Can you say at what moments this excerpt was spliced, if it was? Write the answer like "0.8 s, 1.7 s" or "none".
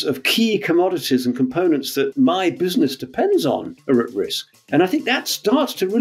2.1 s, 4.0 s